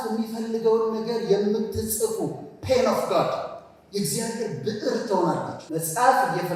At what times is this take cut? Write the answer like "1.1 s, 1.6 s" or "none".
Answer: 5.6 s